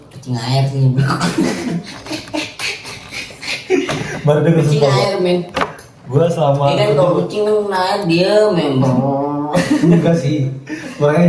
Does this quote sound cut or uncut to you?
uncut